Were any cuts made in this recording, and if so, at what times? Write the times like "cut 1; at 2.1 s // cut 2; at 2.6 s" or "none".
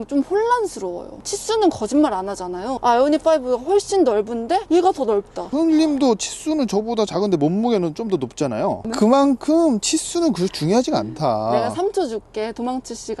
cut 1; at 1.2 s